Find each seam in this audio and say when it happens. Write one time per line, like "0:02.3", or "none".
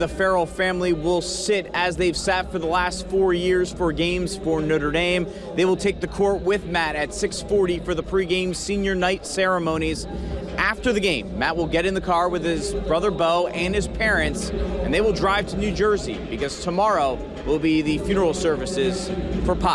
none